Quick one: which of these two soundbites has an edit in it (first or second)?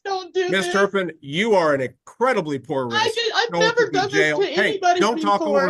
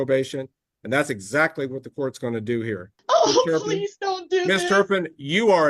second